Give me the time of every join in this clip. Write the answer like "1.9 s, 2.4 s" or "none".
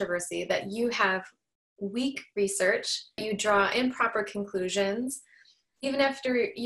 3.2 s